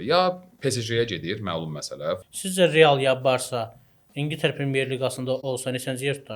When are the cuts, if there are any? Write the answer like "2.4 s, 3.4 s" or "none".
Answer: 2.2 s, 5.4 s